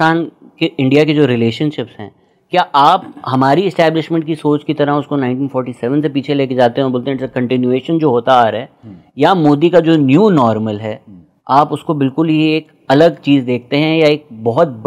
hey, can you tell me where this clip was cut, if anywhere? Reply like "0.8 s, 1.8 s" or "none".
none